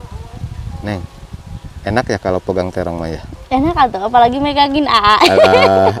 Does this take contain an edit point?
no; 0 cuts

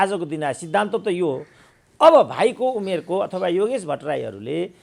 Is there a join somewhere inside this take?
no; 0 cuts

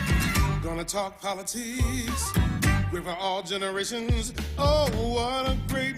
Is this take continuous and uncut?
yes; 0 cuts

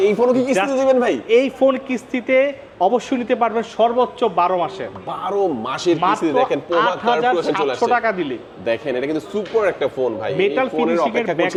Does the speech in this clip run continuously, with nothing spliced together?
yes; 0 cuts

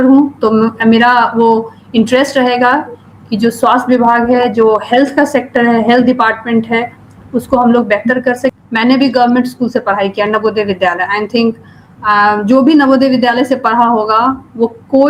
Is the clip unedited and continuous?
no; 1 cut; at 8.5 s

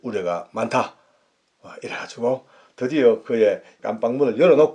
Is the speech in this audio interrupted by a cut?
yes; 1 cut; at 3.8 s

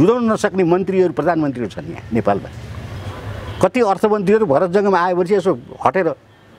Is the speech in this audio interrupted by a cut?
no; 0 cuts

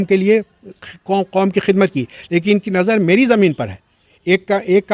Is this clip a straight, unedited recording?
yes; 0 cuts

